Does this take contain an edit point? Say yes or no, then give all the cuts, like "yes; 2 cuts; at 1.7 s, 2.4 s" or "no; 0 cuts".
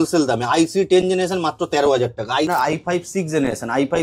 yes; 1 cut; at 2.5 s